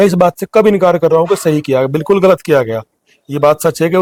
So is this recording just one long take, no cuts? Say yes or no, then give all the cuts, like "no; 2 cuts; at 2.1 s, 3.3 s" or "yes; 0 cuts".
yes; 0 cuts